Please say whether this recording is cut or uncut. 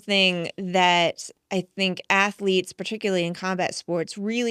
uncut